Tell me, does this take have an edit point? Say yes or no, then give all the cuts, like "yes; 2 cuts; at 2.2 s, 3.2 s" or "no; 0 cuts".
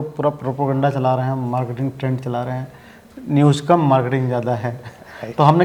no; 0 cuts